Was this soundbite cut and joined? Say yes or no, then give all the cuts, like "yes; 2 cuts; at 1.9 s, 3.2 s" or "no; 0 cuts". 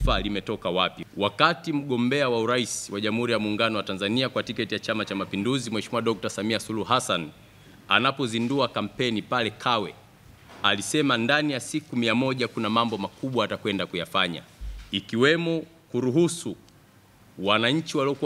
yes; 1 cut; at 1.0 s